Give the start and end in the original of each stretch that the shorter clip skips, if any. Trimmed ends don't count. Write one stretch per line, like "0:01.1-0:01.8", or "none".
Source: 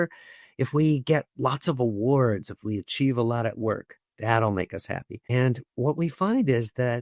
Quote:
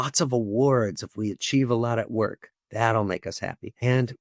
none